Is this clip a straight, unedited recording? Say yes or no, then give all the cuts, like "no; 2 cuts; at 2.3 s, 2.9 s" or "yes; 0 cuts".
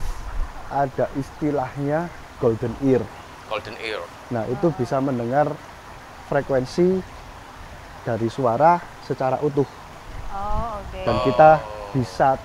yes; 0 cuts